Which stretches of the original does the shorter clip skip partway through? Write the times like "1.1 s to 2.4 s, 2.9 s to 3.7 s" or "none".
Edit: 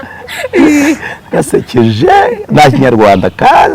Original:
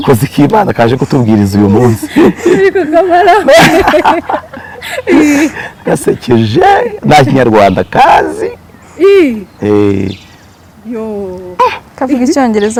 none